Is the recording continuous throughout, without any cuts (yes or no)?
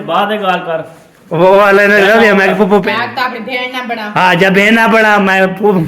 no